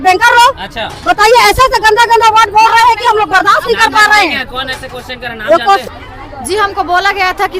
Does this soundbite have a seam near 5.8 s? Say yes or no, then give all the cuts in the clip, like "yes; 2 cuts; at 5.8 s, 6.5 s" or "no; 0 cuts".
yes; 1 cut; at 5.8 s